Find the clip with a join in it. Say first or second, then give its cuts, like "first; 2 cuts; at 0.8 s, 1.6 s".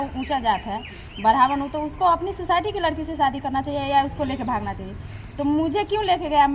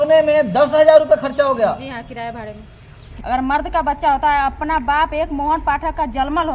second; 1 cut; at 3.0 s